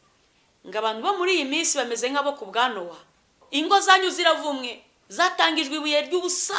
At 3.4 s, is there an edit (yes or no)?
yes